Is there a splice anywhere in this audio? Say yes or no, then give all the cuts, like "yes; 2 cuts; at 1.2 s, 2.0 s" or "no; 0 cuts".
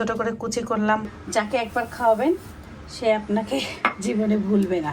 yes; 1 cut; at 1.2 s